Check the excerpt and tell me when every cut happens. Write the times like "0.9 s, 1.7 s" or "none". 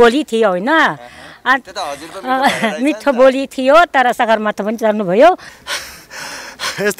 5.5 s